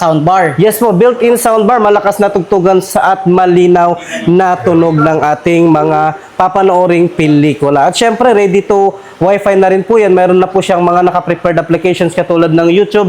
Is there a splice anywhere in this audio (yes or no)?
no